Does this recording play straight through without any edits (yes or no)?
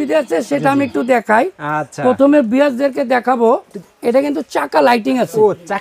yes